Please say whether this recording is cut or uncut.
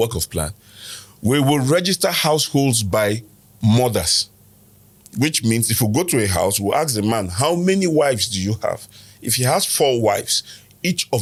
uncut